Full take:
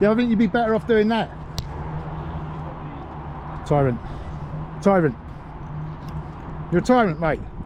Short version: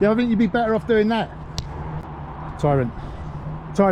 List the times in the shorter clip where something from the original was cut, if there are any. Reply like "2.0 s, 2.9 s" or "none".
2.0 s

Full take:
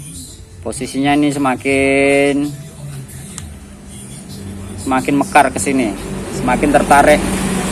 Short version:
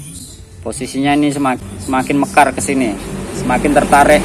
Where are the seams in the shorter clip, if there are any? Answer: 1.6 s

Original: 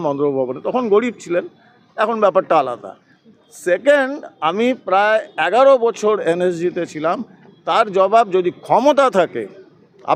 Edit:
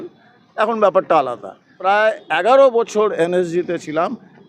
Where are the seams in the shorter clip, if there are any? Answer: 1.8 s

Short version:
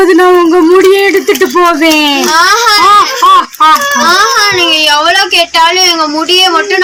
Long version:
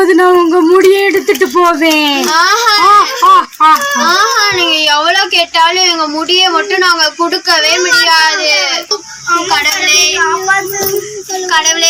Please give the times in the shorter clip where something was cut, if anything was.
none

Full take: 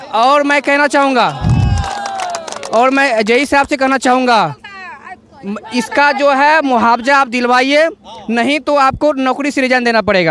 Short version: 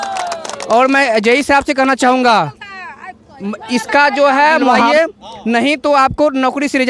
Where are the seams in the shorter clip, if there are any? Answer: 4.9 s

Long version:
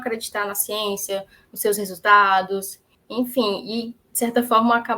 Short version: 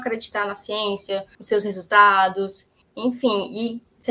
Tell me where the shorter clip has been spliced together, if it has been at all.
1.3 s

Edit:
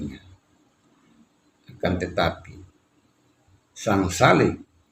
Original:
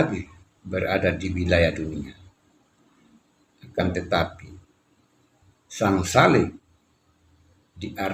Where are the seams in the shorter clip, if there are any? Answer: none

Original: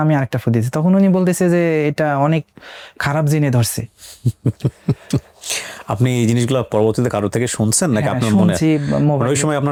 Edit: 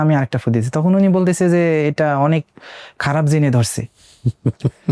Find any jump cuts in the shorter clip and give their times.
none

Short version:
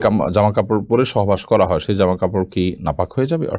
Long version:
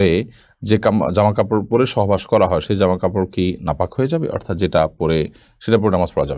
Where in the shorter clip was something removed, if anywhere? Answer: none

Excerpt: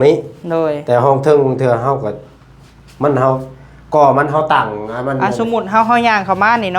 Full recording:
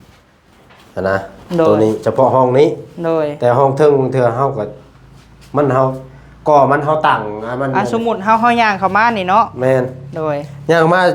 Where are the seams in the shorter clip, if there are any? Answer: none

